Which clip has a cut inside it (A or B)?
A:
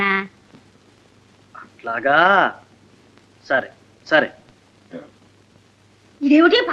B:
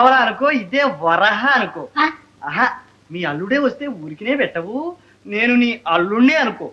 A